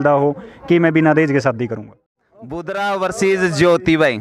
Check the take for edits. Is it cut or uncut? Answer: cut